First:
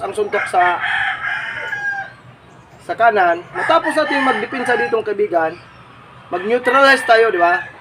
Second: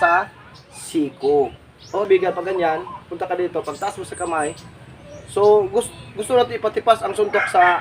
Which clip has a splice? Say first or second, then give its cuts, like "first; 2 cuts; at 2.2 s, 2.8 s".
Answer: second; 1 cut; at 2.1 s